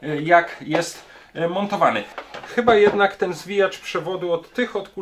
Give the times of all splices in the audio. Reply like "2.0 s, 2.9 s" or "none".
2.2 s